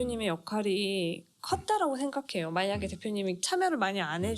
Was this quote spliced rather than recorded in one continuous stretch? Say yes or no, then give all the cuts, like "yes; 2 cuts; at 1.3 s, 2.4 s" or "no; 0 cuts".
yes; 1 cut; at 3.4 s